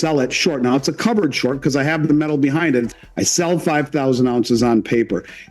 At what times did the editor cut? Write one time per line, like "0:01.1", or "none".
0:02.9